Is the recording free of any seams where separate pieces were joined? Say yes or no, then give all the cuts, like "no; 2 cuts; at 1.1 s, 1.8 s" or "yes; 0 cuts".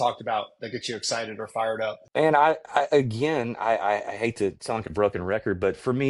no; 1 cut; at 2.0 s